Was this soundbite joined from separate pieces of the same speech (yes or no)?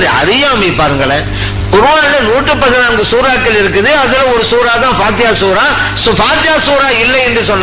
no